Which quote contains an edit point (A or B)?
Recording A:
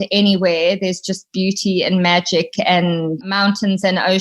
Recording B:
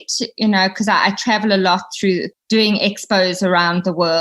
A